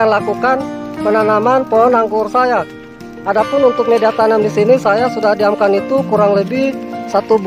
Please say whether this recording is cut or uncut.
uncut